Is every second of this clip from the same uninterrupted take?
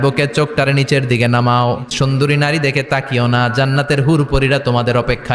no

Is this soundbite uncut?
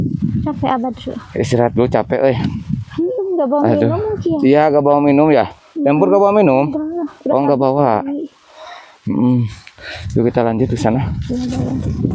yes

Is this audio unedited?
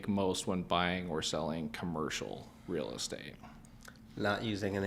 yes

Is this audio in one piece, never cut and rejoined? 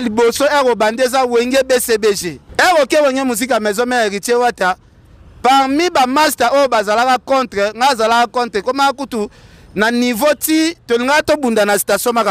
no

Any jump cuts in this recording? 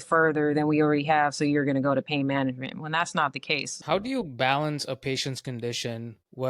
yes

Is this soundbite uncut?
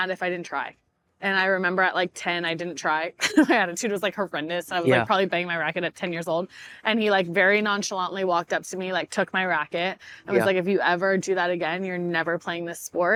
yes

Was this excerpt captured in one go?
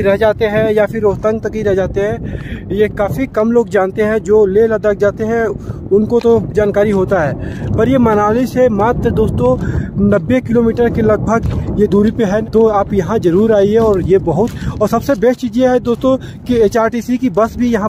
yes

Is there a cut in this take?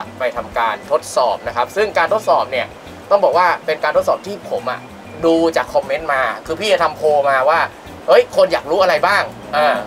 no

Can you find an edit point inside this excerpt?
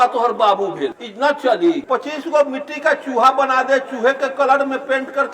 yes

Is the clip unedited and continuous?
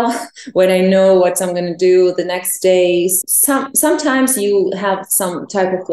no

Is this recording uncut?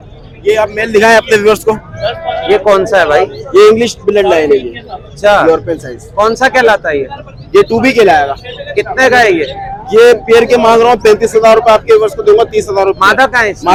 yes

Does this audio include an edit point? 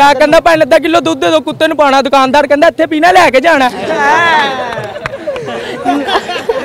no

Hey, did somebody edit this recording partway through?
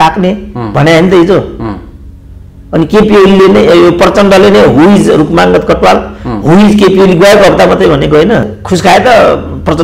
yes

